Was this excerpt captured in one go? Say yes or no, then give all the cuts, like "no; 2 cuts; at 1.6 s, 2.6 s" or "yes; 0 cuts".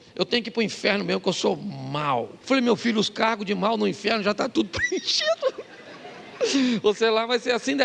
no; 1 cut; at 2.4 s